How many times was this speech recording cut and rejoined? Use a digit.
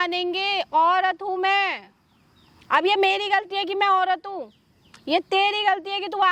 0